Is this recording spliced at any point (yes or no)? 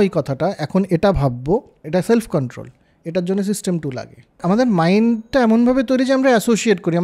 yes